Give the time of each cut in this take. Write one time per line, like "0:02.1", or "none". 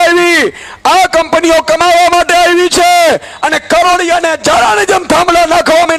none